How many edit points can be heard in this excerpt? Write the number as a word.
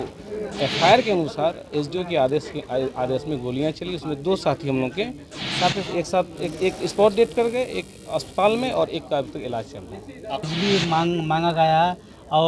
one